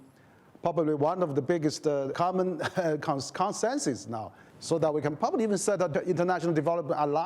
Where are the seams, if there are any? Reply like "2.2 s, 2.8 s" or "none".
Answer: 2.1 s, 5.9 s